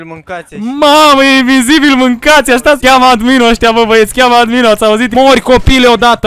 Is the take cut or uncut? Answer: cut